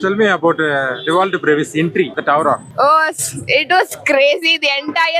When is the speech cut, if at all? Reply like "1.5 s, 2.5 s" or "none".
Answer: 2.4 s